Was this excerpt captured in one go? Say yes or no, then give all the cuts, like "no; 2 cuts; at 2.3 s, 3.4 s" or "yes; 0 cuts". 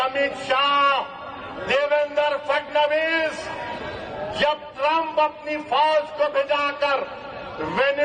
yes; 0 cuts